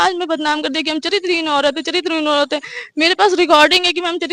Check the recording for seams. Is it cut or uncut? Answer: uncut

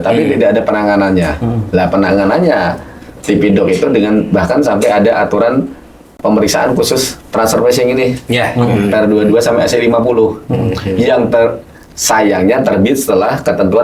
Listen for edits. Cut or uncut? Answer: uncut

